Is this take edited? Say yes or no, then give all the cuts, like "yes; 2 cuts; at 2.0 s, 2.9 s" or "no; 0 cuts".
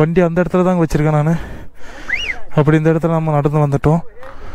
no; 0 cuts